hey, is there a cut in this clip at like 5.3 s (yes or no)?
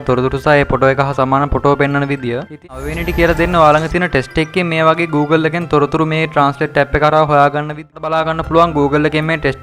no